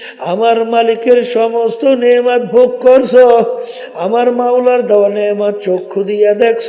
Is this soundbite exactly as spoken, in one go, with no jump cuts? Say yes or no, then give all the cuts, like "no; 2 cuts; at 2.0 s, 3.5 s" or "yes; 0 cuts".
yes; 0 cuts